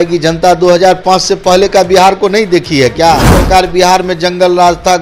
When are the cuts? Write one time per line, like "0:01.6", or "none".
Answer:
0:03.3